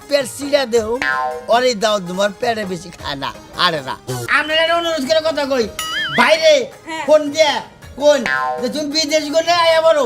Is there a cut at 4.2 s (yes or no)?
yes